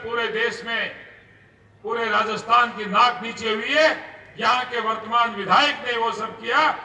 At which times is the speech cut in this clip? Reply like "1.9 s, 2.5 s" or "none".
none